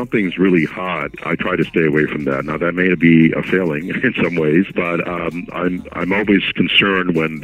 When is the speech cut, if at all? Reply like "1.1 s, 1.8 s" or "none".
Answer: 1.1 s, 4.7 s